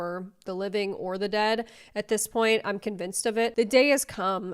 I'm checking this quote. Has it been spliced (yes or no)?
yes